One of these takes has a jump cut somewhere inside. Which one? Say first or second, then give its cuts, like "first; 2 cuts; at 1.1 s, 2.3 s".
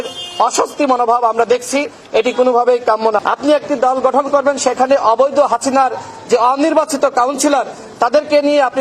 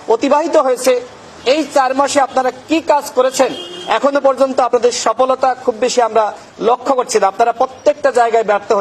first; 1 cut; at 3.2 s